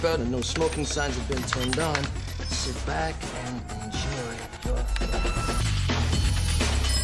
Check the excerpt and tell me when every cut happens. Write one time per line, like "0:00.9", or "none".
0:05.6